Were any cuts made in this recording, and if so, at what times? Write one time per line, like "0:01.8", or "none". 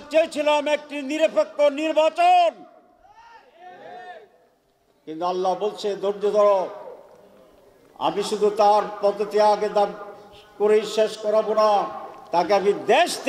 none